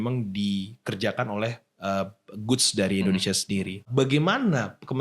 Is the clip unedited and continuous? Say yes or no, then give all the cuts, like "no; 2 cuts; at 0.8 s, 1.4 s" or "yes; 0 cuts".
no; 1 cut; at 3.9 s